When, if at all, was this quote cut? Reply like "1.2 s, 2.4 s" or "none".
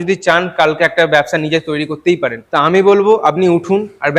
none